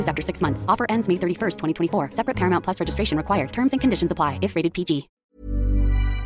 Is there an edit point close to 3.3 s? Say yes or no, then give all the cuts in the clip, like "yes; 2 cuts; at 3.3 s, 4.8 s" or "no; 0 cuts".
no; 1 cut; at 5.1 s